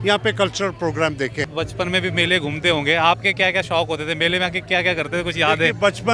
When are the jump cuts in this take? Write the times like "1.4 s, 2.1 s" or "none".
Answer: 1.5 s

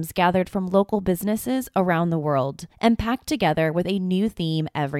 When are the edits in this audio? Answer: 2.6 s

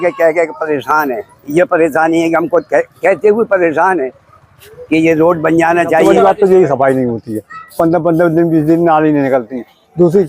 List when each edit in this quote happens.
6.1 s

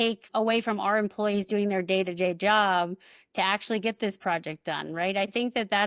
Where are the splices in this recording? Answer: none

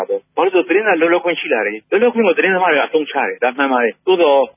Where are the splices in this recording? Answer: none

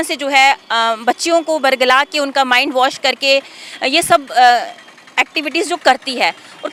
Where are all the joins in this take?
none

